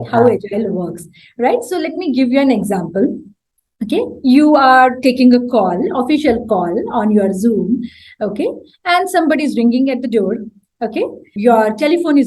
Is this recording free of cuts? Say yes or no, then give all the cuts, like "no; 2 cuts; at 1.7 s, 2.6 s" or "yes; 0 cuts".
no; 1 cut; at 11.3 s